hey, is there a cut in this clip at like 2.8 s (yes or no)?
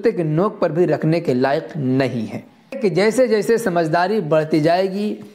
yes